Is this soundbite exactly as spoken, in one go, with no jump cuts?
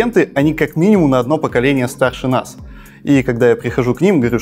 yes; 0 cuts

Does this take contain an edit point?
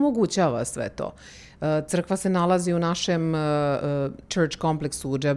no; 0 cuts

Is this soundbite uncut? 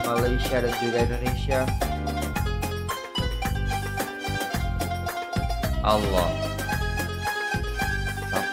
yes; 0 cuts

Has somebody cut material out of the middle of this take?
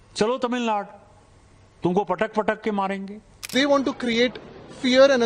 yes; 1 cut; at 3.5 s

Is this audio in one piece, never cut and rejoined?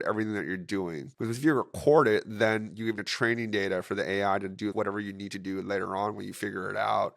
no; 3 cuts; at 1.1 s, 3.0 s, 4.7 s

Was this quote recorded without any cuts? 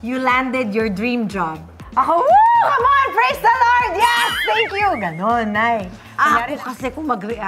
yes; 0 cuts

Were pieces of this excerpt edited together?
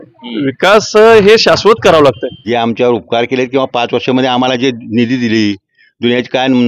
yes; 1 cut; at 2.3 s

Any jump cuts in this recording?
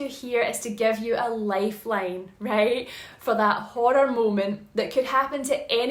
no; 0 cuts

